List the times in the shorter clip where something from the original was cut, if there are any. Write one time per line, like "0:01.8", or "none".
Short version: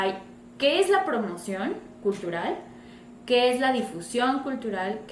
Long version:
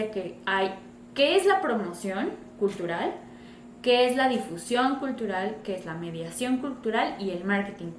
none